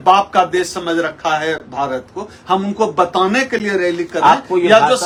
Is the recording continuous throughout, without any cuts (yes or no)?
yes